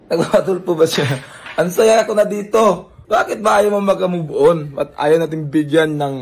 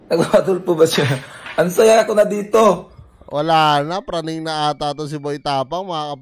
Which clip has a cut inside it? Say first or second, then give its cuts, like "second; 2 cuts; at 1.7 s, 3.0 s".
first; 1 cut; at 2.9 s